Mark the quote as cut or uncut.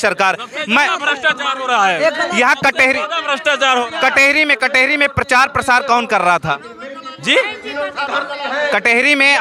uncut